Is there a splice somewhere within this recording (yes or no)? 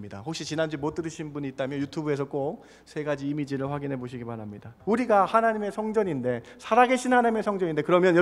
yes